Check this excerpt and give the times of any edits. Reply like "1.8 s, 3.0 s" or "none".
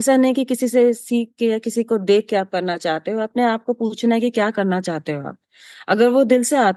none